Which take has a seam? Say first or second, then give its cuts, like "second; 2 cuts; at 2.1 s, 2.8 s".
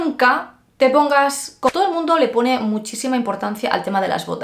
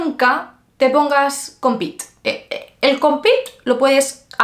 first; 1 cut; at 1.7 s